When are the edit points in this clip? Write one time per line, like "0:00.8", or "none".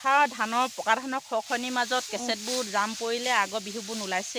none